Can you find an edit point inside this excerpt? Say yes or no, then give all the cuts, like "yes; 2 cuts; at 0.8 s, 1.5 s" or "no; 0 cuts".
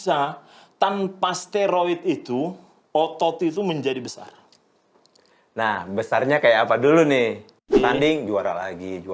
yes; 1 cut; at 7.7 s